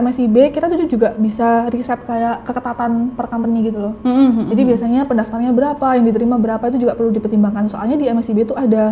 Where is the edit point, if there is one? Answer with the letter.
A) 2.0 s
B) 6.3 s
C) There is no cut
C